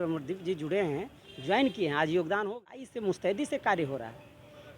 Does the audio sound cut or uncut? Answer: cut